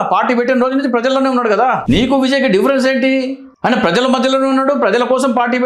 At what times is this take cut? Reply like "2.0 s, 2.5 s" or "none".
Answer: 1.8 s, 3.4 s